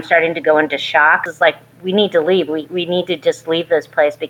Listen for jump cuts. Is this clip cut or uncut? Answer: cut